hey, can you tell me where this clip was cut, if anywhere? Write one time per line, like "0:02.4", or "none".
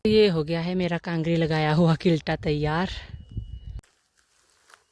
none